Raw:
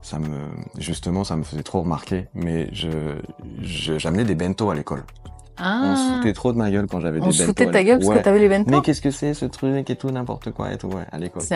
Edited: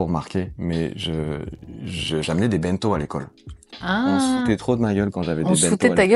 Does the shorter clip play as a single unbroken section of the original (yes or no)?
yes